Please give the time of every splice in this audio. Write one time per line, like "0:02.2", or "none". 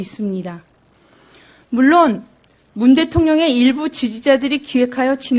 none